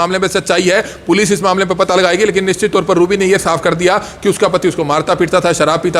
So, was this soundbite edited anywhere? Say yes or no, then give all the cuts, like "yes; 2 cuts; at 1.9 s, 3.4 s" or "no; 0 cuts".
no; 0 cuts